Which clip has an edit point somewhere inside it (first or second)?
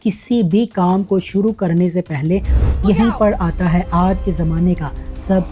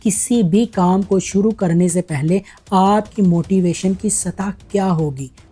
first